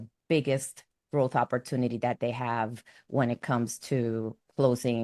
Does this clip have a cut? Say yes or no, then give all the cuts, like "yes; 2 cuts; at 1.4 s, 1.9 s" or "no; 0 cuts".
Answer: no; 0 cuts